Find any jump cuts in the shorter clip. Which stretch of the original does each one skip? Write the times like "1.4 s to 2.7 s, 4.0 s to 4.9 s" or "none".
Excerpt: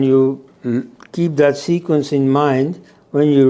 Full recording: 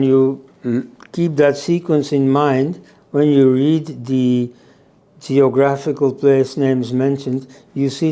none